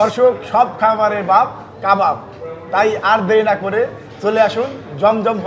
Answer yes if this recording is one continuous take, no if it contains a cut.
yes